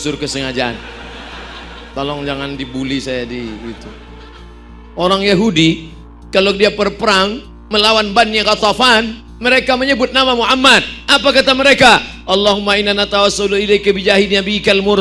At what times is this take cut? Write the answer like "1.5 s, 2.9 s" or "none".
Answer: 4.8 s